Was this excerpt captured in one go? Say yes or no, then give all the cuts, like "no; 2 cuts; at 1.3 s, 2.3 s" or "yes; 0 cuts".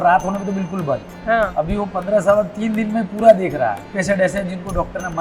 no; 1 cut; at 4.0 s